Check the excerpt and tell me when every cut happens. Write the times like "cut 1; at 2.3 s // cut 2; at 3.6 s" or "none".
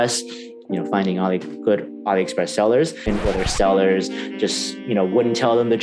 cut 1; at 3.1 s